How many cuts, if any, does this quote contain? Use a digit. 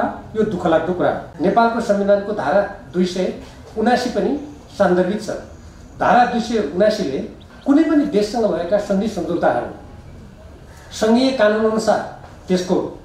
1